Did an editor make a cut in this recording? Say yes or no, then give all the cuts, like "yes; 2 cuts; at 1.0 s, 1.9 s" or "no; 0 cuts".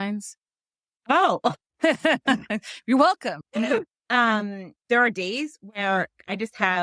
yes; 1 cut; at 3.9 s